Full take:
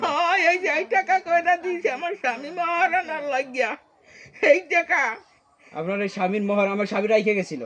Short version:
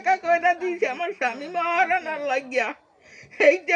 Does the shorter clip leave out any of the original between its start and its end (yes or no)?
no